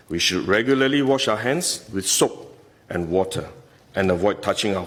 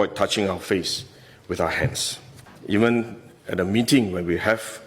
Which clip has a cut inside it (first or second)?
second